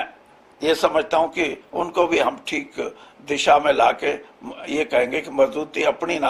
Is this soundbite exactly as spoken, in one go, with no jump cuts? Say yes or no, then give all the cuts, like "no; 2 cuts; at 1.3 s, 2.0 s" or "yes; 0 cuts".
yes; 0 cuts